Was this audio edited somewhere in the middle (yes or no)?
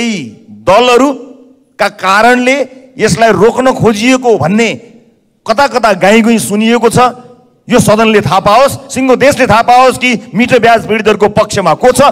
no